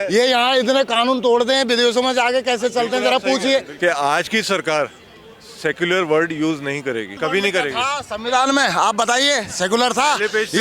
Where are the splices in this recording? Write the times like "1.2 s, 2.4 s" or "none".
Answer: 3.7 s, 7.1 s